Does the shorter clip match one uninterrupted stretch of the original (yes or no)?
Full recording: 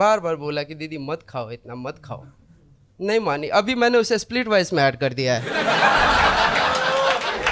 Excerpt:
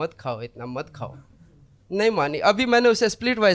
yes